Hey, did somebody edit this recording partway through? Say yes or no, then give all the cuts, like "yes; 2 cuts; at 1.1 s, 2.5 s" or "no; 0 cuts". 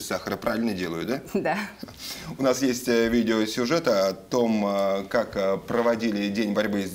no; 0 cuts